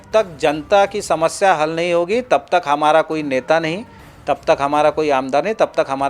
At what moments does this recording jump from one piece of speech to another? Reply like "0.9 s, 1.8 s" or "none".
none

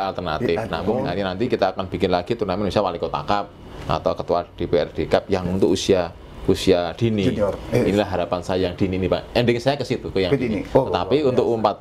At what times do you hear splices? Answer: 1.0 s

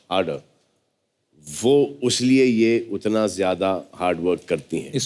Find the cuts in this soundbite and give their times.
none

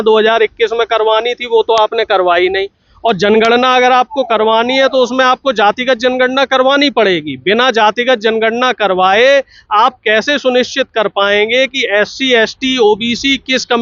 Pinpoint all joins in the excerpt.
none

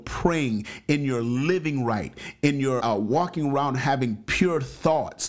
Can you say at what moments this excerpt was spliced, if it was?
2.8 s

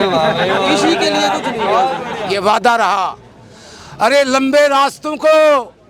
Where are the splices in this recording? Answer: 2.3 s

